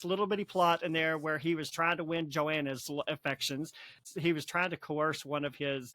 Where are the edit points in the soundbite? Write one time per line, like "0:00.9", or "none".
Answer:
0:01.7
0:04.0